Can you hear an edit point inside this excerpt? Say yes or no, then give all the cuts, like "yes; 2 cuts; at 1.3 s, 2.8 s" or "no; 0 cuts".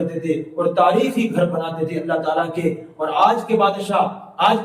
no; 0 cuts